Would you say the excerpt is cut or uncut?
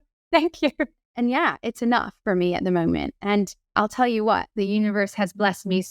cut